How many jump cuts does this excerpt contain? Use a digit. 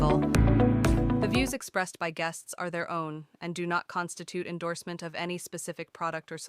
1